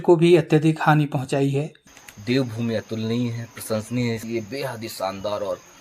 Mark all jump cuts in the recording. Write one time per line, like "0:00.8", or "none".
0:01.8
0:04.2